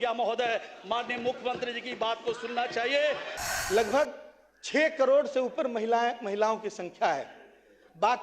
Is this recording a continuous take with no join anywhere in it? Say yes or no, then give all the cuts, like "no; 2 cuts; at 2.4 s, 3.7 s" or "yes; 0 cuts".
no; 1 cut; at 3.3 s